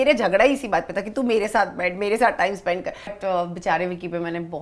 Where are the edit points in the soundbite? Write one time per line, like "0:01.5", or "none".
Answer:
0:03.2